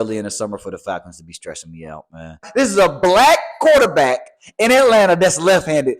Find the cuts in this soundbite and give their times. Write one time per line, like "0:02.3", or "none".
0:02.4